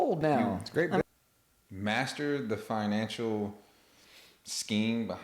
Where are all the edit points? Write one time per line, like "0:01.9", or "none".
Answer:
0:01.0